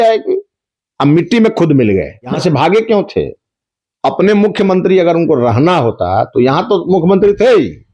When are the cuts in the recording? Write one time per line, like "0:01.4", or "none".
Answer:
0:02.3